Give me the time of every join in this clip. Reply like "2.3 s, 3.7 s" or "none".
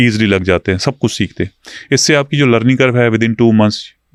none